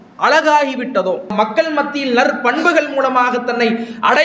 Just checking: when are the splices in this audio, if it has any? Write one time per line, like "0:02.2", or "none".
0:01.3